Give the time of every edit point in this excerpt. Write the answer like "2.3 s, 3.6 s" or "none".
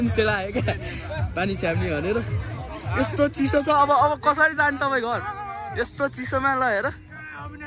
none